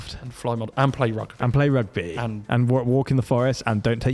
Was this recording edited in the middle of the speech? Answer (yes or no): no